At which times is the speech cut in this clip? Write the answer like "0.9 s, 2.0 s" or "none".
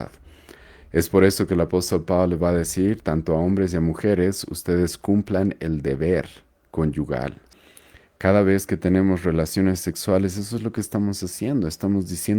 7.5 s